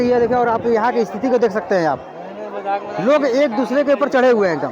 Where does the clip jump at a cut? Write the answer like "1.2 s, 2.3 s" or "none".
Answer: none